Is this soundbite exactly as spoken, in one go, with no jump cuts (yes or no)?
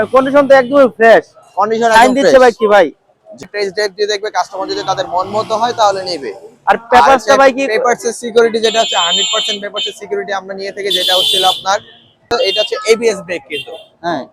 no